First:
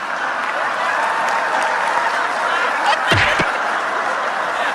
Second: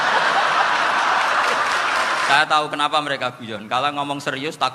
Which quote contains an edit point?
second; 1 cut; at 2.3 s

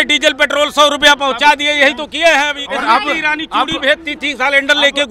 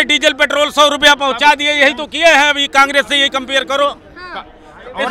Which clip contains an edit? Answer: first; 1 cut; at 2.6 s

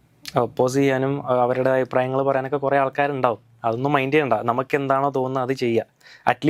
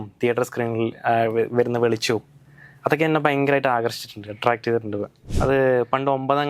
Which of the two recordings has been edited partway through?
second; 1 cut; at 5.2 s

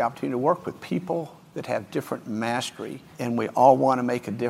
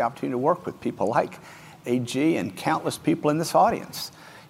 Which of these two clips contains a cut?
first; 2 cuts; at 0.8 s, 3.0 s

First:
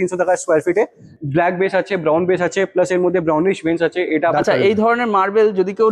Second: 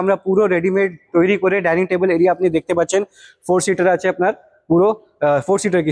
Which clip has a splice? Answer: first; 2 cuts; at 1.0 s, 4.3 s

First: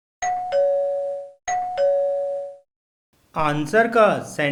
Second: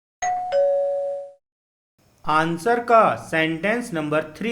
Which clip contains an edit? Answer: second; 1 cut; at 1.3 s

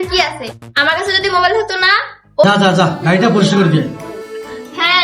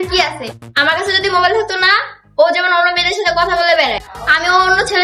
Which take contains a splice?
first; 1 cut; at 2.4 s

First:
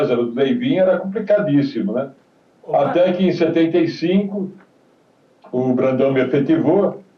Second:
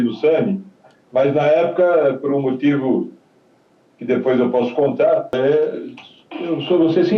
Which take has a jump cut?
second; 1 cut; at 5.4 s

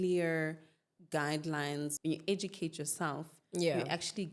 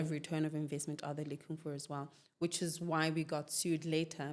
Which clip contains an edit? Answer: first; 1 cut; at 2.0 s

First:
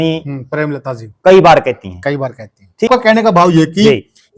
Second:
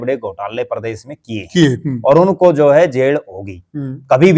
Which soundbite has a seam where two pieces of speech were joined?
first; 1 cut; at 2.9 s

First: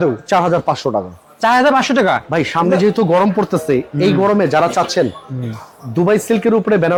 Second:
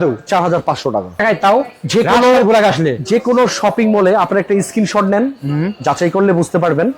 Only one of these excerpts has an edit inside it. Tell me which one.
second; 1 cut; at 1.2 s

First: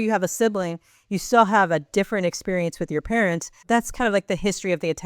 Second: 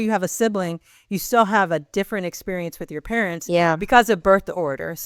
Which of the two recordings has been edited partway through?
first; 1 cut; at 3.5 s

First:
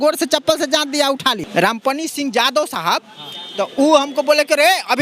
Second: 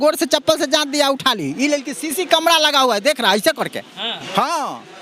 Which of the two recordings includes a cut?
first; 1 cut; at 1.4 s

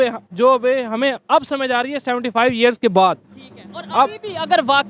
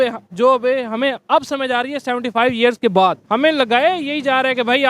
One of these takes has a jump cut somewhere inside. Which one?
second; 1 cut; at 3.2 s

